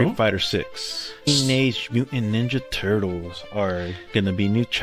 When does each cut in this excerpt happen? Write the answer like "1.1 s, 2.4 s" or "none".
1.3 s